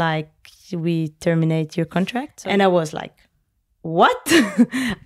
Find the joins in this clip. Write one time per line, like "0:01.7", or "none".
0:02.3